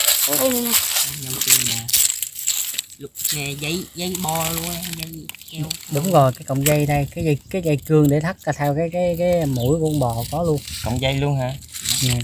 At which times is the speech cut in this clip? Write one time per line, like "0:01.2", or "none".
none